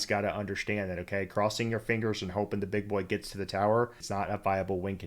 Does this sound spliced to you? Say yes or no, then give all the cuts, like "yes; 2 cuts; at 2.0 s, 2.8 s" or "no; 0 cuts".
yes; 1 cut; at 4.0 s